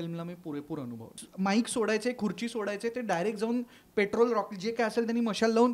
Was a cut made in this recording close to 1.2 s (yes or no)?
yes